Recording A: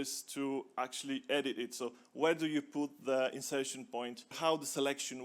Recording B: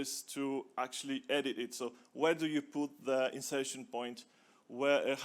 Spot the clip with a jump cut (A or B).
A